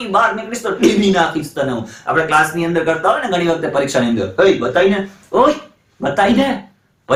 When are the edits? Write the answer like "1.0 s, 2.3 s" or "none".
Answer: none